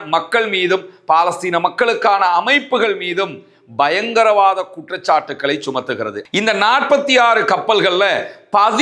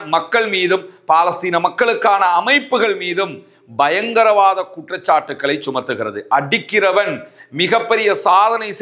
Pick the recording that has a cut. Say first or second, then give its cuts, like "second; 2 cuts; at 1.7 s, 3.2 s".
first; 1 cut; at 6.2 s